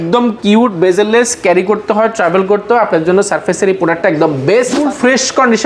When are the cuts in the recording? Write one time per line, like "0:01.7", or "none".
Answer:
0:04.7